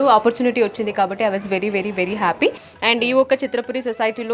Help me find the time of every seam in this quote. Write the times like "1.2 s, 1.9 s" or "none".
2.7 s